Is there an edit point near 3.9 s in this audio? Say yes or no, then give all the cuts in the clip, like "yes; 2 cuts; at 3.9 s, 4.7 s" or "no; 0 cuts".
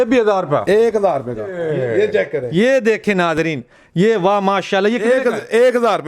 no; 1 cut; at 1.5 s